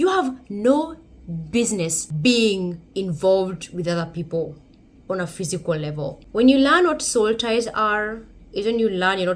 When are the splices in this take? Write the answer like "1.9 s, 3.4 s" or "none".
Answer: 2.0 s, 6.2 s

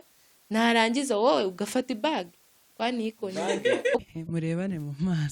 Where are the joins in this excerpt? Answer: 4.0 s

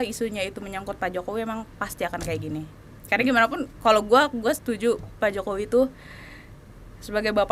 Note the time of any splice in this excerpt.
none

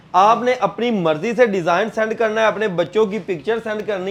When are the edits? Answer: none

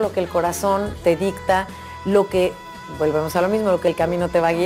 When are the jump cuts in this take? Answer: 1.9 s

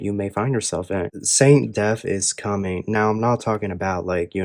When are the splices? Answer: 1.2 s

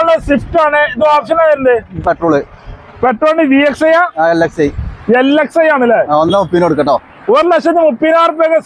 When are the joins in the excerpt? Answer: none

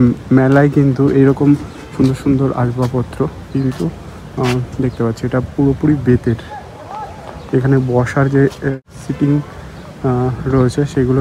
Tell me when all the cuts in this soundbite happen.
8.7 s

